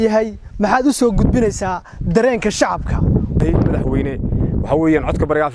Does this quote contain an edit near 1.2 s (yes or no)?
no